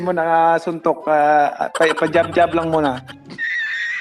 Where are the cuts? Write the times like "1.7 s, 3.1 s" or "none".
3.1 s

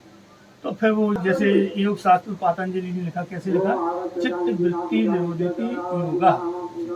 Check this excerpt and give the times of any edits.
1.2 s

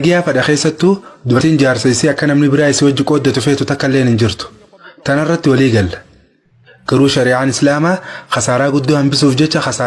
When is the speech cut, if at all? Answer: 1.4 s

